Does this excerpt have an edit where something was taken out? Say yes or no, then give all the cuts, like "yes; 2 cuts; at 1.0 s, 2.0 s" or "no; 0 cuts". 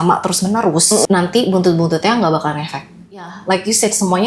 yes; 2 cuts; at 1.1 s, 3.3 s